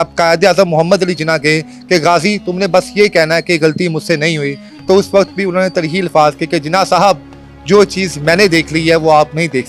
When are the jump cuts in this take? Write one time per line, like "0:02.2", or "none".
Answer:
none